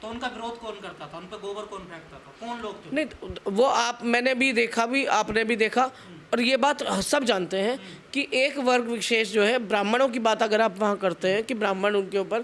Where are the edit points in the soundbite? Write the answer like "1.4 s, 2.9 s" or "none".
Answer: none

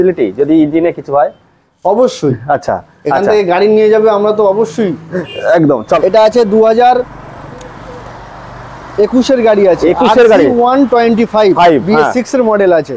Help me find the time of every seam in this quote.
6.0 s

